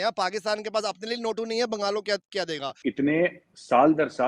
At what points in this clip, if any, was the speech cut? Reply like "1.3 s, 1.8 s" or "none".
2.6 s